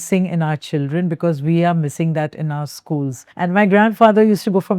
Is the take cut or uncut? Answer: cut